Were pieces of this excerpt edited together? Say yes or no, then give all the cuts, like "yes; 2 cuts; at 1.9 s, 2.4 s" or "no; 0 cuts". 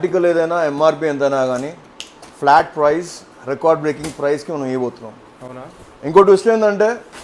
no; 0 cuts